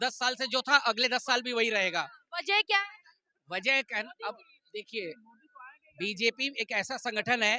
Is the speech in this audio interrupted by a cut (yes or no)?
no